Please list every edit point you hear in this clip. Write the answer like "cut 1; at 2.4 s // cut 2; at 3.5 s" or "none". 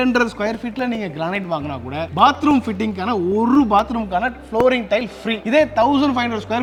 none